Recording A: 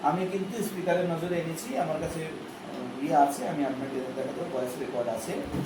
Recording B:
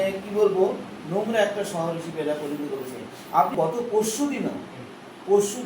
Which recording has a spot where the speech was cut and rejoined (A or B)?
B